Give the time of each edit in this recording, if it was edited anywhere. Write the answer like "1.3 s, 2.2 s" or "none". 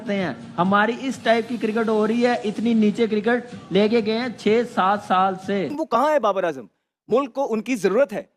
5.8 s